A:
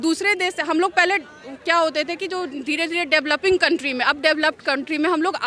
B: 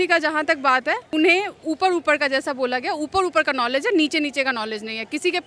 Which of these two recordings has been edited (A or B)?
B